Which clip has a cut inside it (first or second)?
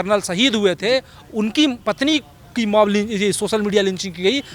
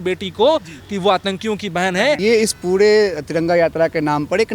second